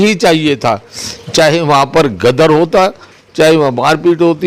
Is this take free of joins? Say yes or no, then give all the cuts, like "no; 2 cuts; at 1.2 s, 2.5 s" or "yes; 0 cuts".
yes; 0 cuts